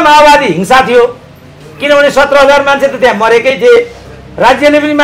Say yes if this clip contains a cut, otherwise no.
no